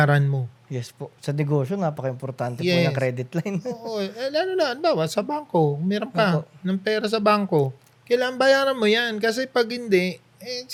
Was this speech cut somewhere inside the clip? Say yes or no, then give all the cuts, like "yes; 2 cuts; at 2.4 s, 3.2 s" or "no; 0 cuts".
no; 0 cuts